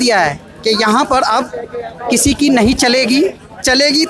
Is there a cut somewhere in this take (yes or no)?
no